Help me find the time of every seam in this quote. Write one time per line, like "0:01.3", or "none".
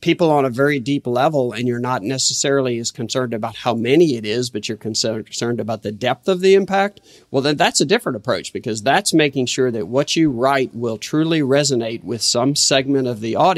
none